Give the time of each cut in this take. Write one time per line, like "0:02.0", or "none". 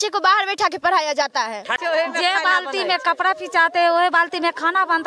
0:01.8